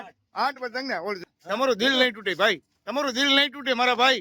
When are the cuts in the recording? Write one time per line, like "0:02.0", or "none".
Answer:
0:01.2